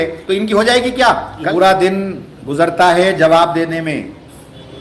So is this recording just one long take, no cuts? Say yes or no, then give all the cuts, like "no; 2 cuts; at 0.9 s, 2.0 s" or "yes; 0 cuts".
no; 1 cut; at 1.4 s